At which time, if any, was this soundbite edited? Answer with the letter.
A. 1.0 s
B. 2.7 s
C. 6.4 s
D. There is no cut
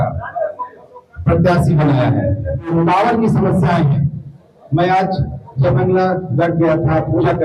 B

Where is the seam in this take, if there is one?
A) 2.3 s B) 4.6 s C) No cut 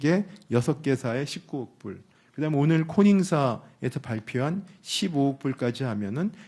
C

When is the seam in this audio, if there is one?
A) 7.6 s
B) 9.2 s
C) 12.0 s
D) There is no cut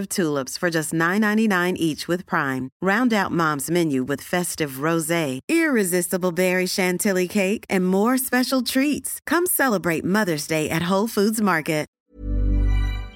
C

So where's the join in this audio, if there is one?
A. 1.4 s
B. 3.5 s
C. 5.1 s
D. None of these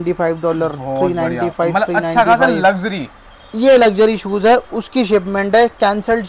D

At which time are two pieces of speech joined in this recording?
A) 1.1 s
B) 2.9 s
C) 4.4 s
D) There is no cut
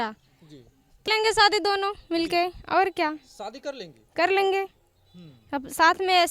A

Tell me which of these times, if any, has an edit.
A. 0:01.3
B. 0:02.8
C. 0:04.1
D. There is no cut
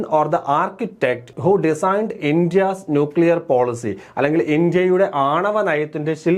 A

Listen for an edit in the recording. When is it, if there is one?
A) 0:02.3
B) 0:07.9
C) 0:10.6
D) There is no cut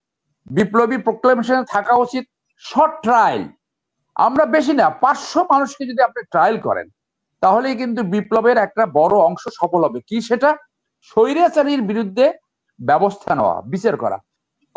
D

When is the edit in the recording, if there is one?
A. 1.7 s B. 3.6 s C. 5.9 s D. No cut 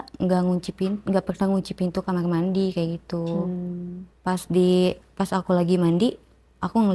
D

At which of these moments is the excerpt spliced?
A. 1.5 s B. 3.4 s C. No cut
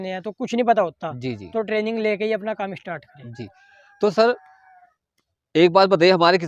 C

